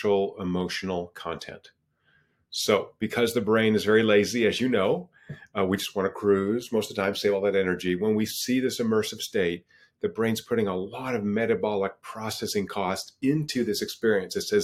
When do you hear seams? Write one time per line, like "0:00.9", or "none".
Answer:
none